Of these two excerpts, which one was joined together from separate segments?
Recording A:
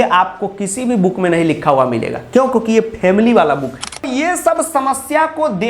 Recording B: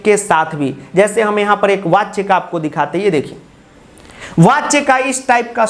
A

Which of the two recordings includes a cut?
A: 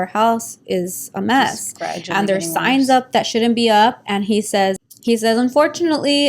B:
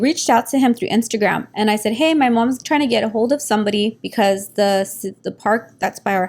A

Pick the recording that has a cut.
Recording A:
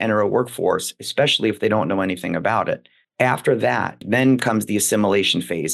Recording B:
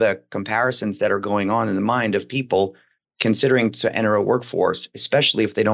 A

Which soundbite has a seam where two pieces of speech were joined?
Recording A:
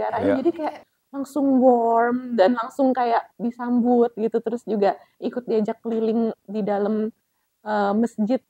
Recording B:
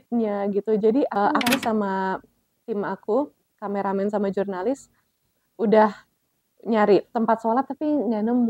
B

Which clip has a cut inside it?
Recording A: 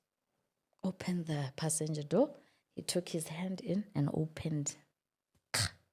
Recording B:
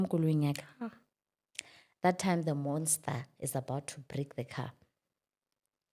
B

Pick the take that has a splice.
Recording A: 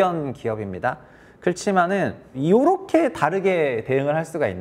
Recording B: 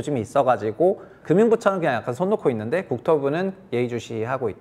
B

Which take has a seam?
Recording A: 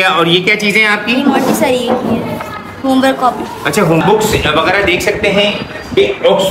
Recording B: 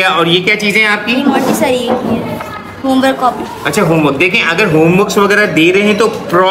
A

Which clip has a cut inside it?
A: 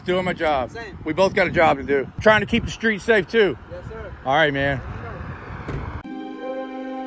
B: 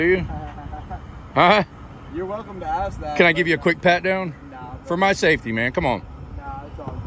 A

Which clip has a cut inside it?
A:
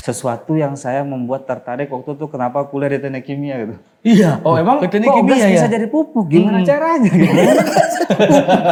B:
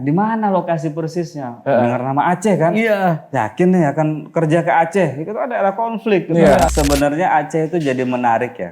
B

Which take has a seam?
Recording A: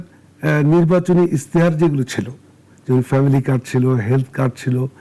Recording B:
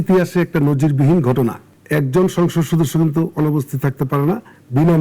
B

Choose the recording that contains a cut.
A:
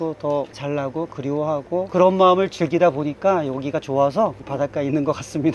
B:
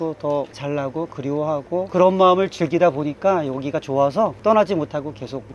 A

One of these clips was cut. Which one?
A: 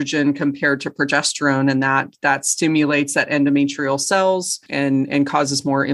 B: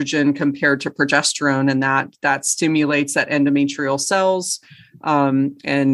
A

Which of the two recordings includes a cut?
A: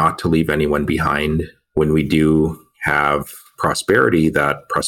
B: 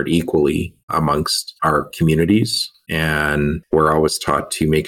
B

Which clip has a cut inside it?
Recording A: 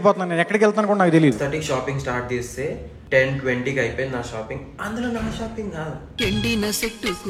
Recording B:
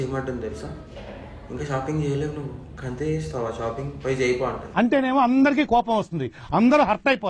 A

